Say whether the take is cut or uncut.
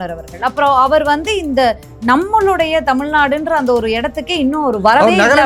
uncut